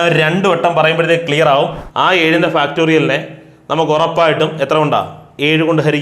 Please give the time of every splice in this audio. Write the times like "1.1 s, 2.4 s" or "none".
1.8 s